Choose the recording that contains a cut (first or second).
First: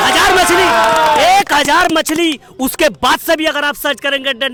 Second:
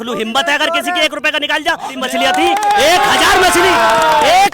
second